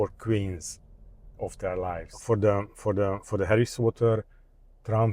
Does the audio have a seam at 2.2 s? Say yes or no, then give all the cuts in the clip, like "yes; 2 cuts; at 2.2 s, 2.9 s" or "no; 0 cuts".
yes; 1 cut; at 2.2 s